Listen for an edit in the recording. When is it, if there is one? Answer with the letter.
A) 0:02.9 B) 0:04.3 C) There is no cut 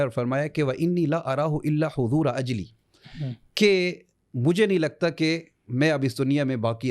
C